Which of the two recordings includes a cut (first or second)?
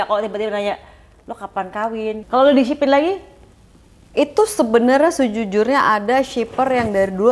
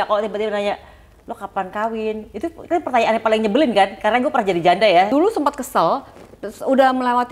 first